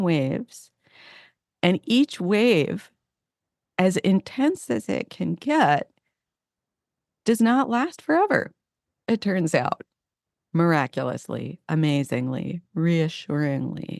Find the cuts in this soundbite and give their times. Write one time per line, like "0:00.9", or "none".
none